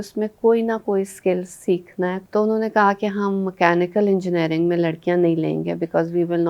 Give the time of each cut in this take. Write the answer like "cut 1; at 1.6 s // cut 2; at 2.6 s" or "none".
cut 1; at 2.2 s